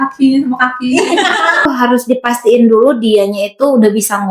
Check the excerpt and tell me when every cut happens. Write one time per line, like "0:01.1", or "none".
0:01.6